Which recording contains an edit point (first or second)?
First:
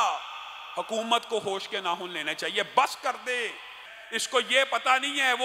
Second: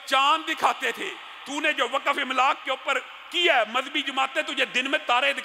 first